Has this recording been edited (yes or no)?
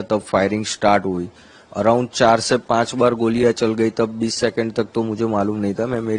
no